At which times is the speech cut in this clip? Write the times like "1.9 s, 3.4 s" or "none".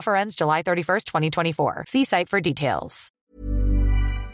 3.3 s